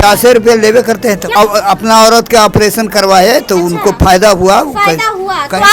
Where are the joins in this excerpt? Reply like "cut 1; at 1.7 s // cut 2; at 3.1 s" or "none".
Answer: cut 1; at 1.3 s